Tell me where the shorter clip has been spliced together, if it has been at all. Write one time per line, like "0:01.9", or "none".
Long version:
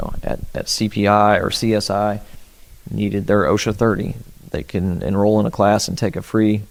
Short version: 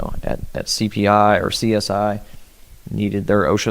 none